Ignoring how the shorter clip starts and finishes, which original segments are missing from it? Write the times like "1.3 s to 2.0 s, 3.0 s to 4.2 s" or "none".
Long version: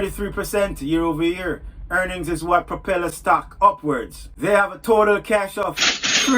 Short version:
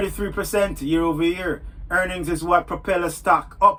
none